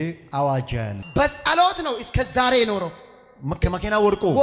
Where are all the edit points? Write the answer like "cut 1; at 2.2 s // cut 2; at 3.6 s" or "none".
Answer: cut 1; at 0.9 s